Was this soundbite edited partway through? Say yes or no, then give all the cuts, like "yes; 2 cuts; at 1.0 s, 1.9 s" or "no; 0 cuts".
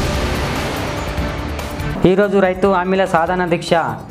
yes; 1 cut; at 1.9 s